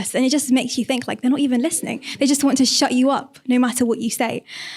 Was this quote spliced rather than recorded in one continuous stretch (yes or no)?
no